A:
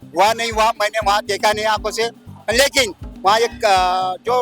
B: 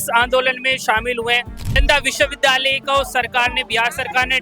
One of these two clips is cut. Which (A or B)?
B